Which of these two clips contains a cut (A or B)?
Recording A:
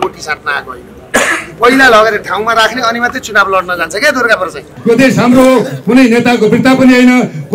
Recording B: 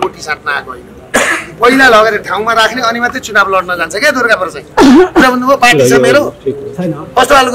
A